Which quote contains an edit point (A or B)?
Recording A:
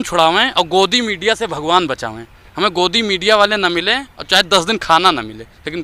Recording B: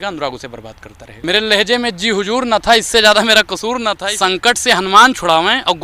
B